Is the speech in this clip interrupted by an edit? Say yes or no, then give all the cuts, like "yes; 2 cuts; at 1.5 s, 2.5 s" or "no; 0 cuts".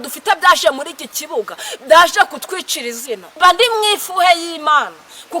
yes; 1 cut; at 3.2 s